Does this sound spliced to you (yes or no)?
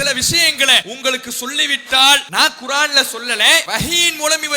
yes